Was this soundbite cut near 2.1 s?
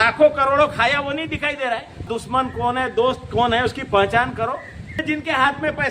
yes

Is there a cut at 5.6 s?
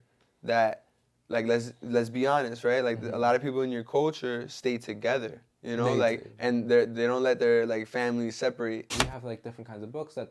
no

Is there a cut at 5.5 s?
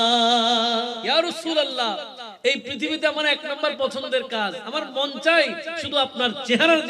no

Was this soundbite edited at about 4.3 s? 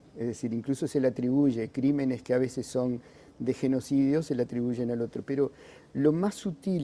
yes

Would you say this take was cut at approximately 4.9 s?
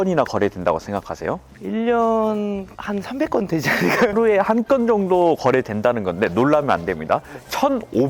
no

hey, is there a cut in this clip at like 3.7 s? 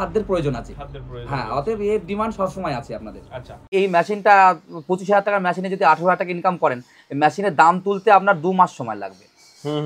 yes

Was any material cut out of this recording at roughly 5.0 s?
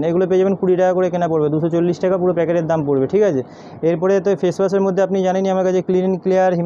no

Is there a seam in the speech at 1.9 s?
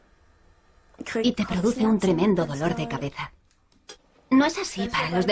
yes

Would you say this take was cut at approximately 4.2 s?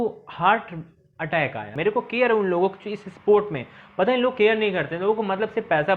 no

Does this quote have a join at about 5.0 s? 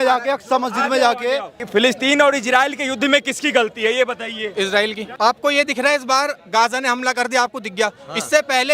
yes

